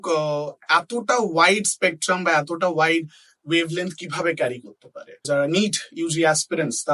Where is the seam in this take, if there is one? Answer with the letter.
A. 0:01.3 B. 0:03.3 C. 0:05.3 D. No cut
C